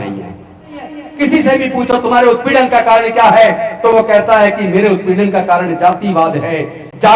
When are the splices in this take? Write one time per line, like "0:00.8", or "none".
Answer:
0:01.0